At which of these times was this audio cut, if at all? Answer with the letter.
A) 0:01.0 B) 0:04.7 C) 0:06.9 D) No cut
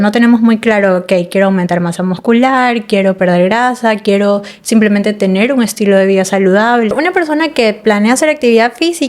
C